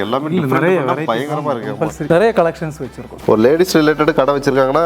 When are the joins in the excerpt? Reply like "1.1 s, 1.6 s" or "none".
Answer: 2.1 s, 3.1 s